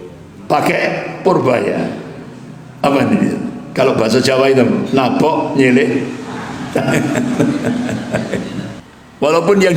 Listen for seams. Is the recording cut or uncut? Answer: cut